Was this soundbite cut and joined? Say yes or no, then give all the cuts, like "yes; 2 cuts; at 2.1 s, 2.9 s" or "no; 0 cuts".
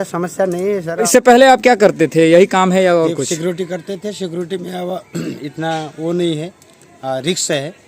yes; 1 cut; at 1.1 s